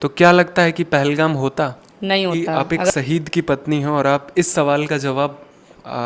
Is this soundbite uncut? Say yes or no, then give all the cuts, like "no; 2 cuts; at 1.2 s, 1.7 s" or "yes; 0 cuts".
no; 1 cut; at 2.9 s